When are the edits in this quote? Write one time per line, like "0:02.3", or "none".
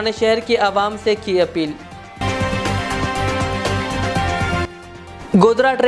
none

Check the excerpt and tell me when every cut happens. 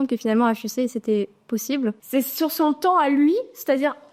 0:02.0

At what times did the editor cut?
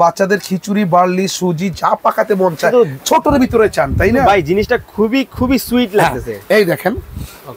none

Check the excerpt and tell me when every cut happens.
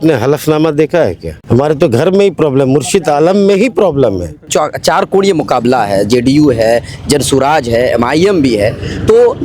0:01.3
0:04.5

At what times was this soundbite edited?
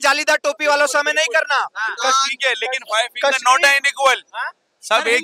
none

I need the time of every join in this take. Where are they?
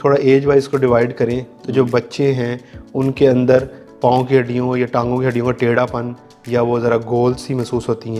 none

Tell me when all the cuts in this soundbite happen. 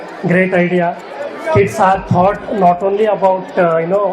none

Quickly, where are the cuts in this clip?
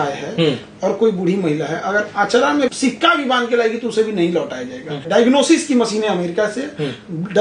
0:02.7
0:05.0

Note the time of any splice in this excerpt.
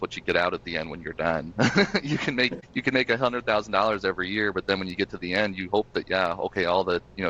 0:02.6

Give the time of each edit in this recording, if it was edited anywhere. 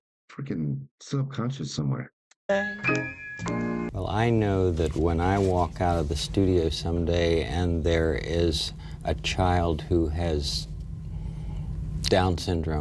0:03.9

